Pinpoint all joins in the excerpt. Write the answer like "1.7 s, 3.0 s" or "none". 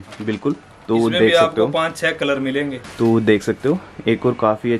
2.8 s

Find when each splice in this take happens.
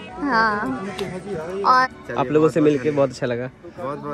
1.9 s

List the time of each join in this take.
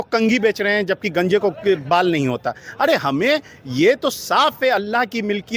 none

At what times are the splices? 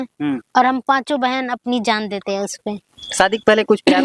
2.8 s

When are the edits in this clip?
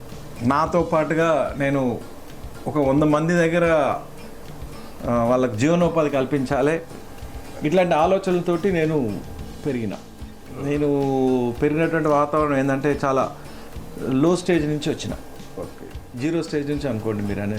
16.2 s

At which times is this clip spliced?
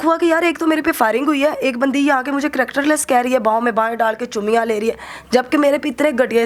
none

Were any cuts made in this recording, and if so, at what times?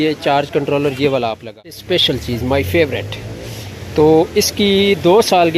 1.7 s

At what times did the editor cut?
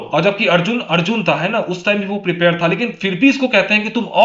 none

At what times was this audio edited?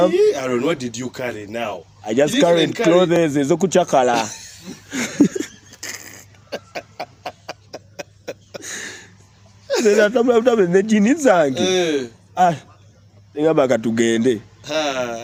none

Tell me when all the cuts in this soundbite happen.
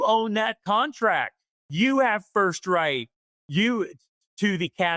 none

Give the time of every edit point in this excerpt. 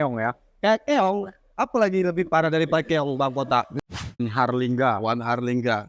4.2 s

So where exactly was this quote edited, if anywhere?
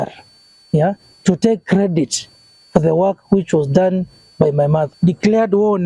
4.9 s

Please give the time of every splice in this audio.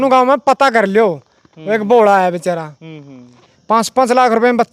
3.6 s

